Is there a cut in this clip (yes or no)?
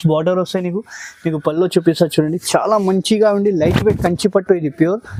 no